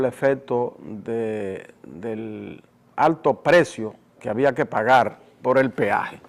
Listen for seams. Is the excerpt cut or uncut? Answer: uncut